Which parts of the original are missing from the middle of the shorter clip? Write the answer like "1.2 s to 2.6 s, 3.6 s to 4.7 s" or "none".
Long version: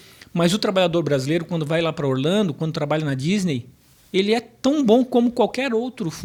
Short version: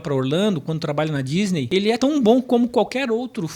3.8 s to 4.5 s